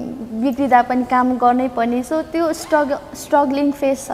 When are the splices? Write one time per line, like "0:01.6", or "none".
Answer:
none